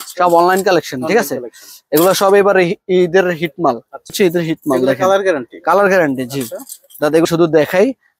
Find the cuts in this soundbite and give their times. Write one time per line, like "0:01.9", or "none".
0:04.1
0:07.3